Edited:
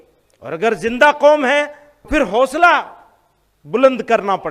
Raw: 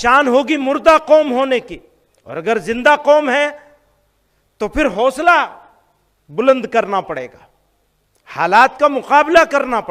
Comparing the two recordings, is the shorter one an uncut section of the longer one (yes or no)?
no